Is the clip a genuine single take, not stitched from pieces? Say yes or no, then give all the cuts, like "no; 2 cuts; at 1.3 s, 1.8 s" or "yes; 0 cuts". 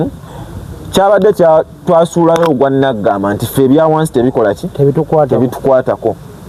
yes; 0 cuts